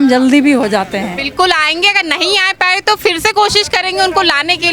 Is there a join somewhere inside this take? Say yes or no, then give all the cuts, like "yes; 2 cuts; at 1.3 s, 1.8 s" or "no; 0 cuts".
yes; 1 cut; at 1.2 s